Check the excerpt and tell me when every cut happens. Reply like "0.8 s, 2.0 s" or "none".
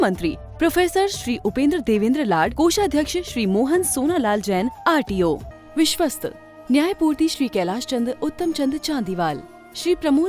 5.5 s